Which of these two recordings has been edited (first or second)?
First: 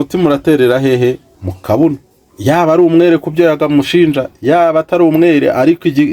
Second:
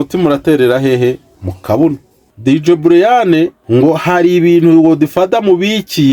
second